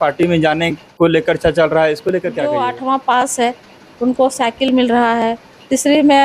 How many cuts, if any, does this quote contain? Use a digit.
1